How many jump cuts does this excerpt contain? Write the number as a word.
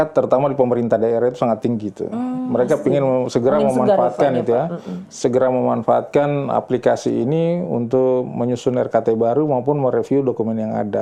zero